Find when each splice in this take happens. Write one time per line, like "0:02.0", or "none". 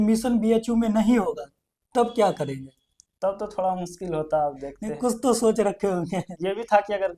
none